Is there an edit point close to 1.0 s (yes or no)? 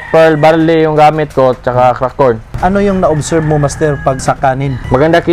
no